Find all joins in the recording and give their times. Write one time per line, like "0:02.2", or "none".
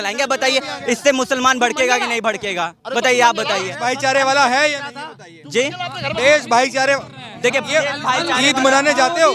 none